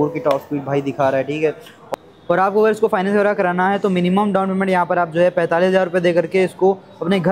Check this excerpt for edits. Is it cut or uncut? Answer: cut